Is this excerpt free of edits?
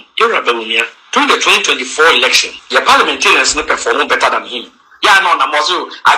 no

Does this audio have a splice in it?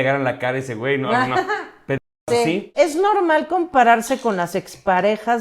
yes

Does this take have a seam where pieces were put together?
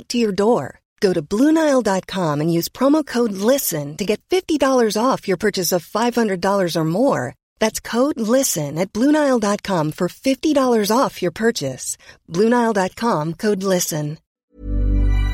yes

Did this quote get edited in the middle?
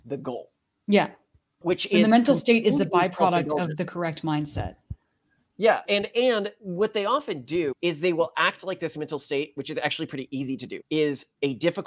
yes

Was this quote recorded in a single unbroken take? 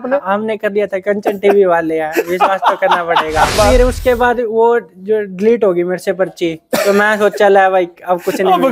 no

